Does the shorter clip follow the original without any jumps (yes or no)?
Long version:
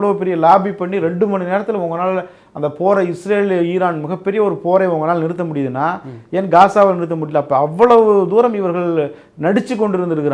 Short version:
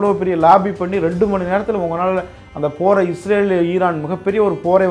yes